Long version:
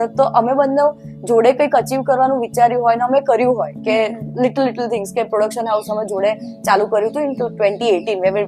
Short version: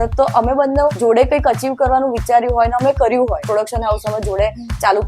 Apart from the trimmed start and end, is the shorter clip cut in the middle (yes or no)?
yes